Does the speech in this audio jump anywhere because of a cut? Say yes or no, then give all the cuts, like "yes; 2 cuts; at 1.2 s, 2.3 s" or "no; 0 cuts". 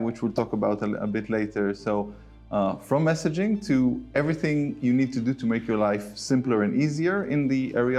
no; 0 cuts